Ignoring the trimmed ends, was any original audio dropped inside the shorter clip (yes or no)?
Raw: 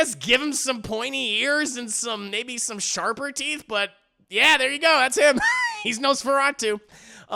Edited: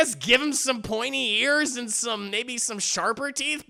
no